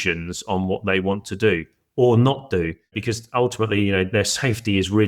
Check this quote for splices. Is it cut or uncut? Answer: cut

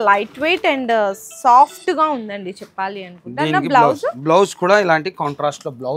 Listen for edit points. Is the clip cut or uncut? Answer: uncut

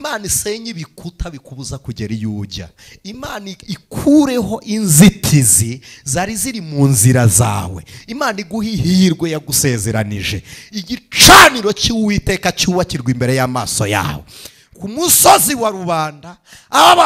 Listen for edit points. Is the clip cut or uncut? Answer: uncut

